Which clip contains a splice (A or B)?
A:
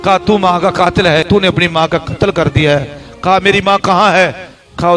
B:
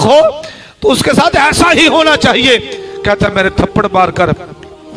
A